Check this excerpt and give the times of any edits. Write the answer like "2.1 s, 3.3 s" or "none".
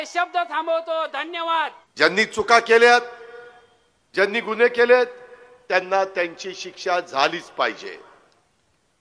1.8 s